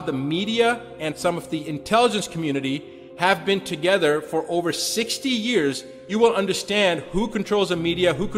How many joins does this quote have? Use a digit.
2